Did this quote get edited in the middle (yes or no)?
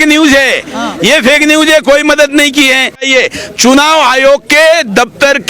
yes